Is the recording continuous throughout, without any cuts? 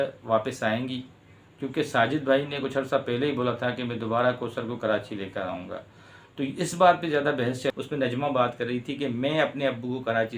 no; 1 cut; at 7.7 s

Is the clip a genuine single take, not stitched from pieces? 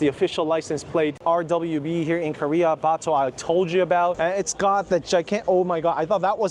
no; 2 cuts; at 1.2 s, 4.1 s

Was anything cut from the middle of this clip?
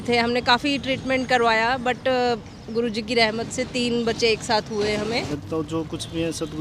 yes; 1 cut; at 5.3 s

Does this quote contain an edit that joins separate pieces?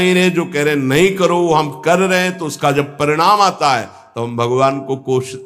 no; 0 cuts

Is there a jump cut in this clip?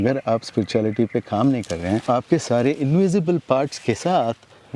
yes; 1 cut; at 2.1 s

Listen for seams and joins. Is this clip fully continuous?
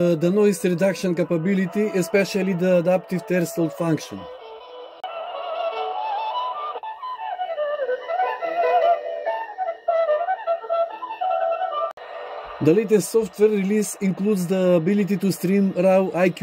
no; 2 cuts; at 5.0 s, 11.9 s

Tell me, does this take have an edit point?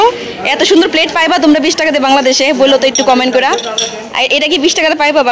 no; 0 cuts

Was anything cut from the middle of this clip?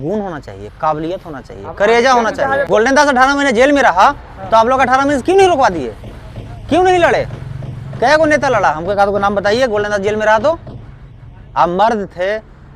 yes; 1 cut; at 2.6 s

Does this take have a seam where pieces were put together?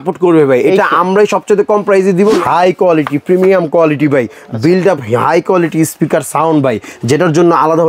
yes; 1 cut; at 2.4 s

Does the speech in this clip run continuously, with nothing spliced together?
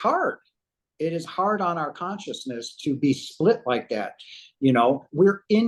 yes; 0 cuts

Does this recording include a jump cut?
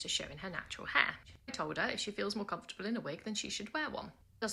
yes; 1 cut; at 1.3 s

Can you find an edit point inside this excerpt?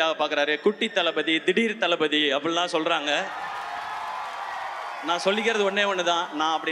no; 0 cuts

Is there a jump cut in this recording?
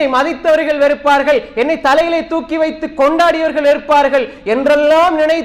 no; 0 cuts

